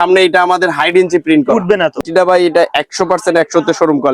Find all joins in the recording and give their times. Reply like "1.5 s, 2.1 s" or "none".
2.0 s